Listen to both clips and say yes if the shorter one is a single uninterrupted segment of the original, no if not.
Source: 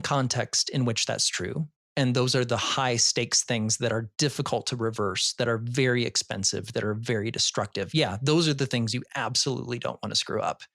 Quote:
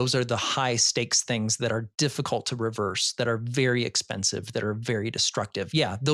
yes